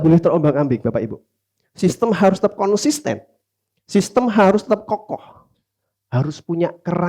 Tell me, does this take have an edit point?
no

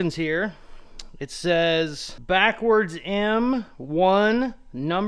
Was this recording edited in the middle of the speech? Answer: no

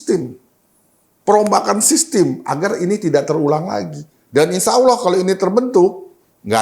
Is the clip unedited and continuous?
no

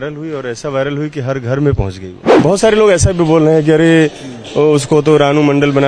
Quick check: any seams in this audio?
yes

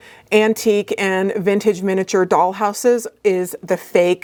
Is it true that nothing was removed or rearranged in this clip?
yes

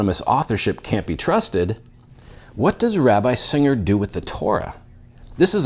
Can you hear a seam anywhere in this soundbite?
no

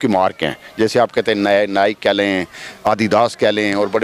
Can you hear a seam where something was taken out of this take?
no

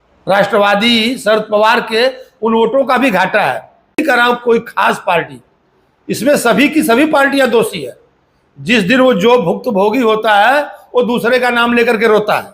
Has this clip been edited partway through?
yes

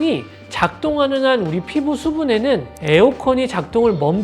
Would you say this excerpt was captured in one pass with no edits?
no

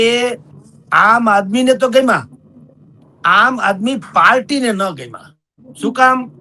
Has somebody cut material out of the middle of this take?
no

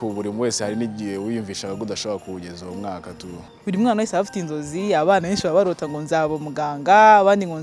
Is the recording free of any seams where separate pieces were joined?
no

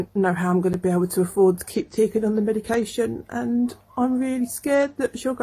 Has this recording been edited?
no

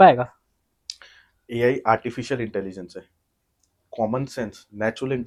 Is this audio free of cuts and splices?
yes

